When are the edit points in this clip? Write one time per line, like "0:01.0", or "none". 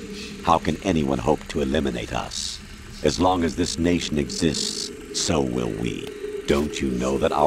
0:06.2